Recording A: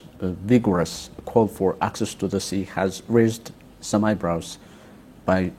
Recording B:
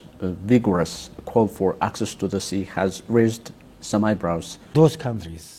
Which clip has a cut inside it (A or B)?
B